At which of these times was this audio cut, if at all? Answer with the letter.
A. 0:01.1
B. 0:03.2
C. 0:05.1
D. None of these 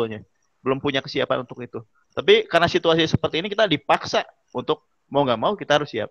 D